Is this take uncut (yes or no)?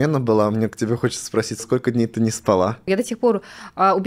no